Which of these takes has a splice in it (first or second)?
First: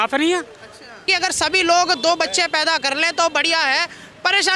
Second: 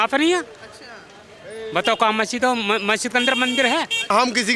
first